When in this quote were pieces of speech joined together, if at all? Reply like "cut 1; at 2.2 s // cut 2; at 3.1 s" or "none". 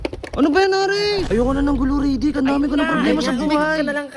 cut 1; at 1.2 s